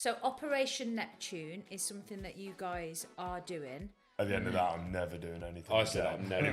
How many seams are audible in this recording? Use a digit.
1